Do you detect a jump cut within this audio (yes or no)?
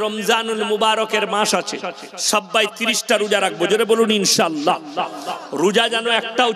no